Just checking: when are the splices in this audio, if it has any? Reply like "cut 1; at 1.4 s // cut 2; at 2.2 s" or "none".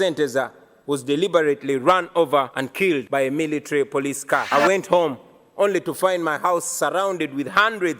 cut 1; at 2.7 s // cut 2; at 4.5 s